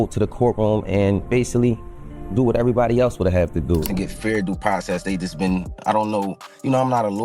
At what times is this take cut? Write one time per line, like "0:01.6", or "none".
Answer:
0:03.8